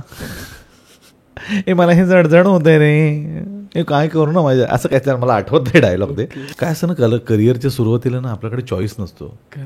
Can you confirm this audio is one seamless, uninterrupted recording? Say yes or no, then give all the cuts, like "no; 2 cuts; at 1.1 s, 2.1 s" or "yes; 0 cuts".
no; 1 cut; at 6.4 s